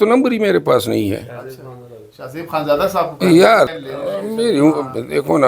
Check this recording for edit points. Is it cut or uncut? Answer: cut